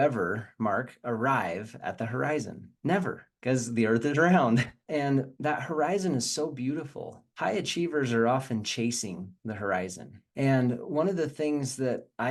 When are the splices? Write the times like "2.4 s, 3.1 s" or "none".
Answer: none